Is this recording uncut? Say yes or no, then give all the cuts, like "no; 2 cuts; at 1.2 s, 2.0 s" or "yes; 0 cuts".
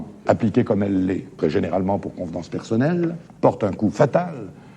no; 1 cut; at 3.2 s